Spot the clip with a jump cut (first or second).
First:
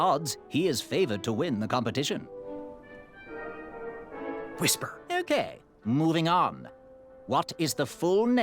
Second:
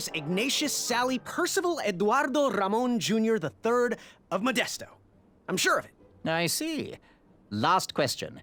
first